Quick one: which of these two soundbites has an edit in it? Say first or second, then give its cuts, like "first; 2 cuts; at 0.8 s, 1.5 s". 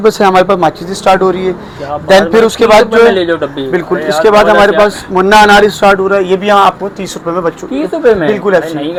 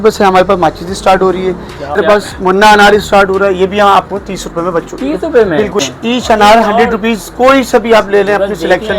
second; 2 cuts; at 2.0 s, 5.8 s